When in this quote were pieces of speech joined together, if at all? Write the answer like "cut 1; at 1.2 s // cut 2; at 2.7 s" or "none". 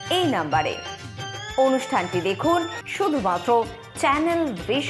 cut 1; at 2.8 s